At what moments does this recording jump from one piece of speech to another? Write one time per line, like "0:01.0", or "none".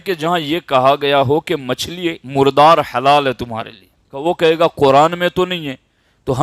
0:02.2
0:04.1